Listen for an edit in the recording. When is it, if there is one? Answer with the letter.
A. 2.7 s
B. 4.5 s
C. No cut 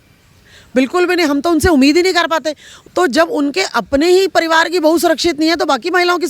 A